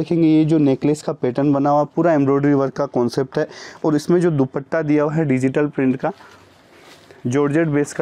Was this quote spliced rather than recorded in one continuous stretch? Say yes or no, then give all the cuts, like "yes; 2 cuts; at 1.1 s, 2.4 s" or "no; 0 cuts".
no; 0 cuts